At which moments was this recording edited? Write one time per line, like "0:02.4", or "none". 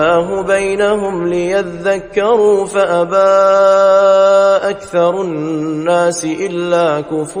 none